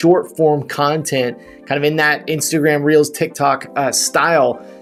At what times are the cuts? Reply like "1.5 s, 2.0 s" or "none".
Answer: none